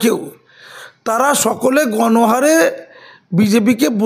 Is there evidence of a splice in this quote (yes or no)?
no